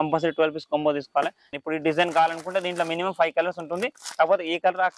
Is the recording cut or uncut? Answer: cut